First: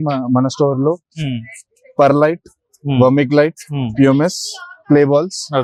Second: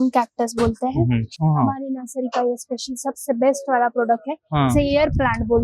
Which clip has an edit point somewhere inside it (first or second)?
second